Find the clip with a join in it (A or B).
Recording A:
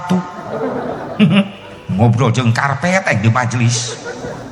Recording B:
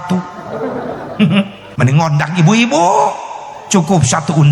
B